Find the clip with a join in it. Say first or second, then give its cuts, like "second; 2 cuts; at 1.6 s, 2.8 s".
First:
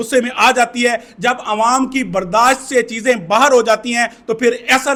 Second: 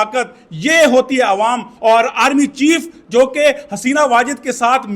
second; 1 cut; at 1.7 s